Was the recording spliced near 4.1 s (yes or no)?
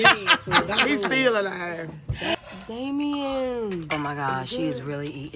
no